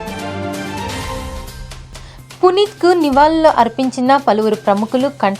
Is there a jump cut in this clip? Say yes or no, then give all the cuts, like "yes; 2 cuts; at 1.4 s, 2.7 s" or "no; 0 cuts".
yes; 1 cut; at 1.8 s